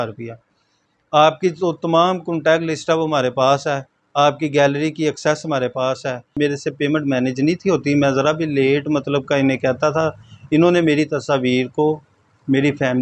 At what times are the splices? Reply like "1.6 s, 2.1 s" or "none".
6.3 s